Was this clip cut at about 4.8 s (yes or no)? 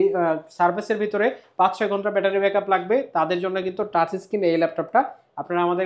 no